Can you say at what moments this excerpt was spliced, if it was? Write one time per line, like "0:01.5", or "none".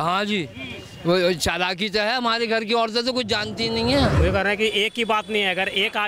0:04.1